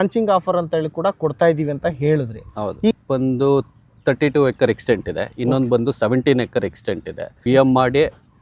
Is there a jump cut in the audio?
yes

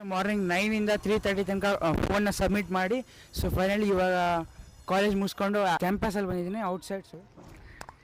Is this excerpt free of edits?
no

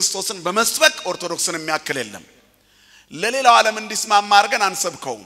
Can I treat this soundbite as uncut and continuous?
yes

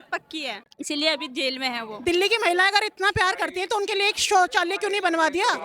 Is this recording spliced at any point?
yes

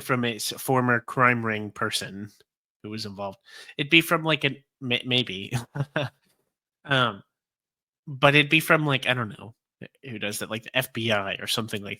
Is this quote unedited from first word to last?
yes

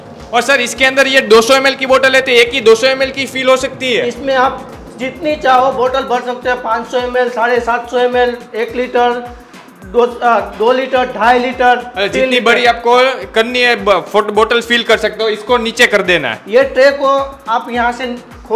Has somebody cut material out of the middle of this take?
no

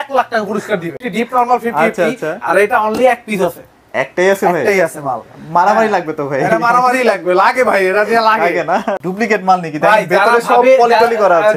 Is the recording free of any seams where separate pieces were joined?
no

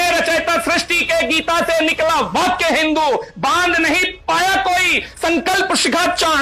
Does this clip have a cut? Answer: no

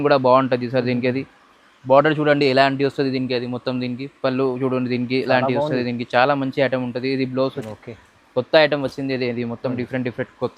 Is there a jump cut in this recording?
yes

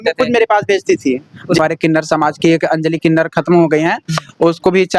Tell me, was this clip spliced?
yes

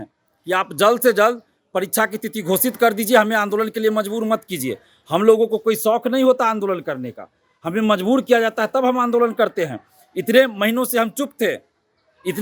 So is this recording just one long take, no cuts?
yes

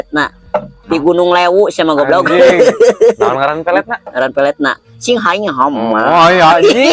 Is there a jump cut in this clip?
no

